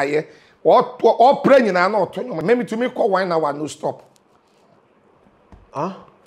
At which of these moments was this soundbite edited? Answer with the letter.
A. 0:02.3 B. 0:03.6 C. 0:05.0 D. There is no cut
A